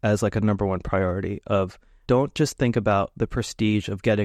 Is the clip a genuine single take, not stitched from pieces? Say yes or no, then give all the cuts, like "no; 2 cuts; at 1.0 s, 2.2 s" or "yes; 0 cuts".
no; 1 cut; at 2.0 s